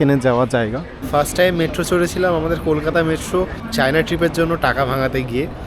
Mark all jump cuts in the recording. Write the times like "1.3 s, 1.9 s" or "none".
1.0 s, 3.6 s